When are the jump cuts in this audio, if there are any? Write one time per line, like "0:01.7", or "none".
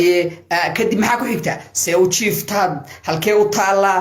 none